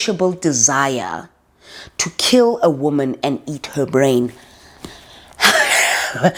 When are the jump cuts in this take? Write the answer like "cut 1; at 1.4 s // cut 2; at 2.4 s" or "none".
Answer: none